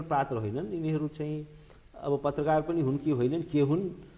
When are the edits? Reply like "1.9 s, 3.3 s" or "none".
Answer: none

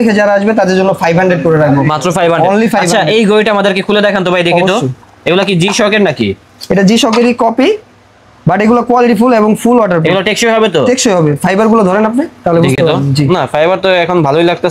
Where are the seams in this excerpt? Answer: none

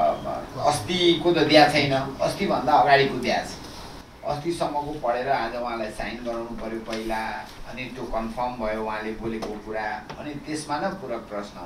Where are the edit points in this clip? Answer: none

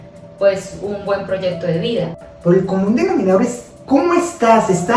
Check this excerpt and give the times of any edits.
2.2 s

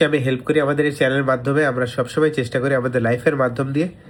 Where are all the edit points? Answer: none

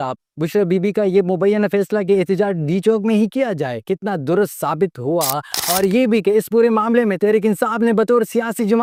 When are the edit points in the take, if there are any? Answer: none

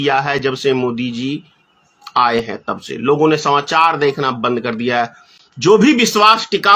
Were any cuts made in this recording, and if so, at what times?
none

